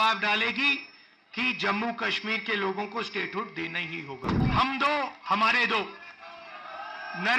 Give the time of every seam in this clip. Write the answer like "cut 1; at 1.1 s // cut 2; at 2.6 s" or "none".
cut 1; at 4.4 s